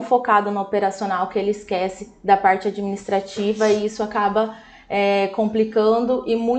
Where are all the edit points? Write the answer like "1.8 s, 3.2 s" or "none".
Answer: none